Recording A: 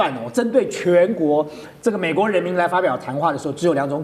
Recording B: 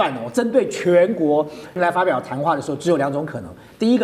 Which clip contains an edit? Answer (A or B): B